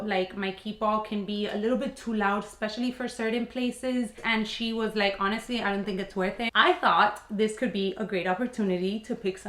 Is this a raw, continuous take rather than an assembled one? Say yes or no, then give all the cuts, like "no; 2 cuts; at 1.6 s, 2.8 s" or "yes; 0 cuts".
no; 2 cuts; at 4.2 s, 6.5 s